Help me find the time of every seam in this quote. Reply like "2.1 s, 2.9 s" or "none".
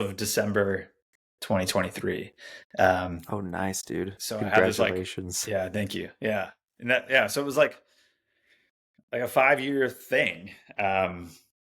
none